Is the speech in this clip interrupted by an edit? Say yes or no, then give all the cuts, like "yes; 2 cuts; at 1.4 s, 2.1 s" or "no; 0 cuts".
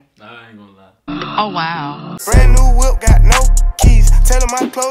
yes; 2 cuts; at 1.1 s, 2.1 s